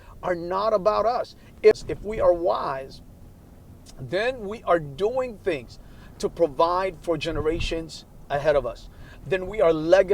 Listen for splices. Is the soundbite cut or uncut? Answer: cut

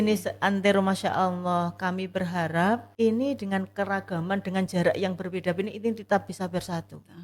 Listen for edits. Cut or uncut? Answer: cut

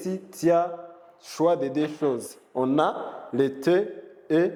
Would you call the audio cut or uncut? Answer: uncut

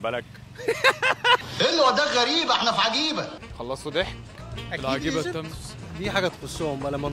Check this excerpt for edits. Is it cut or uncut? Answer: uncut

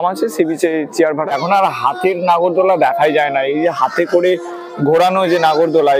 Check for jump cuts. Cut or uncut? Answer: cut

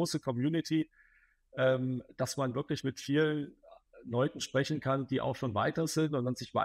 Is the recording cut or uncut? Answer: uncut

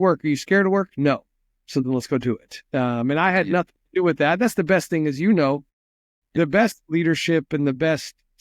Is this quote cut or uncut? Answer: uncut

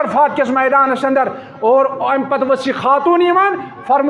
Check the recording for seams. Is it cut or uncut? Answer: uncut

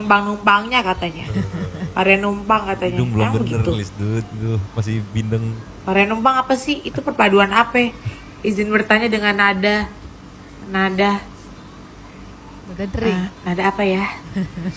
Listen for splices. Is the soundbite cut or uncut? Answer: uncut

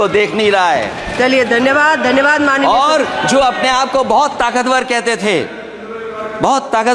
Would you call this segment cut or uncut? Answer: uncut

